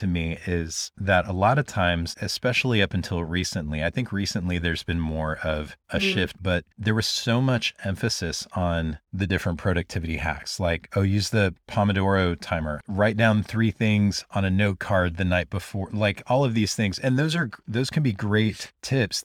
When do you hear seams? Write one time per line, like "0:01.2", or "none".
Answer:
0:02.1
0:06.4